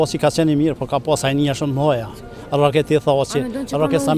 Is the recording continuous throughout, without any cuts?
yes; 0 cuts

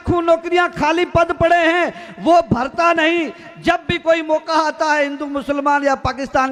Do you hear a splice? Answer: no; 0 cuts

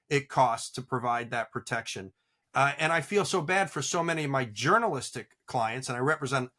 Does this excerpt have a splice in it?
yes; 1 cut; at 2.4 s

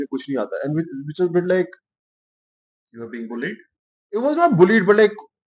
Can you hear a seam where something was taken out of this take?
no; 0 cuts

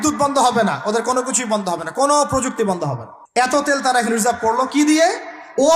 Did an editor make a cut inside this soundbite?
yes; 1 cut; at 3.5 s

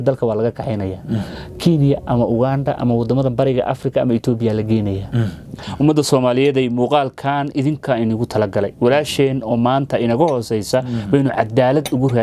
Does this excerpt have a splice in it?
yes; 1 cut; at 5.6 s

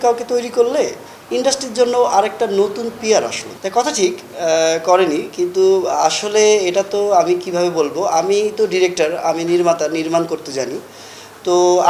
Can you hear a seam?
yes; 1 cut; at 3.5 s

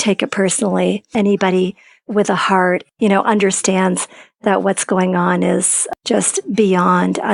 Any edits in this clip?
yes; 3 cuts; at 1.0 s, 2.8 s, 5.9 s

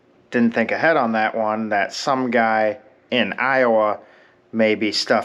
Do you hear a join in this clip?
yes; 1 cut; at 2.9 s

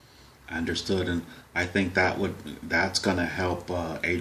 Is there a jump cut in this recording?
no; 0 cuts

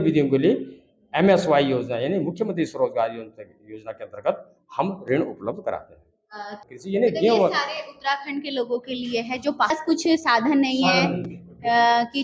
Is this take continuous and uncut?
no; 2 cuts; at 6.7 s, 9.7 s

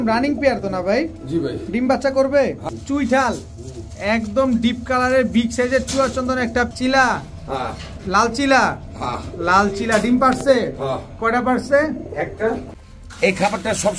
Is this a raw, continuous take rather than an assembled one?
no; 3 cuts; at 2.7 s, 6.7 s, 12.7 s

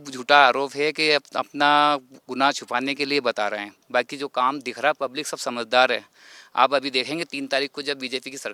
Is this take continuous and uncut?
yes; 0 cuts

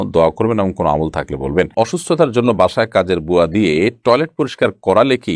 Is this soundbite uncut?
no; 1 cut; at 1.7 s

